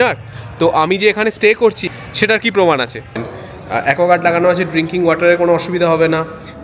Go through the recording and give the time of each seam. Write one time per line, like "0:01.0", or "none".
0:01.8
0:03.3